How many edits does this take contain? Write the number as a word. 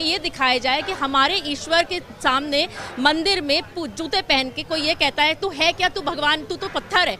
zero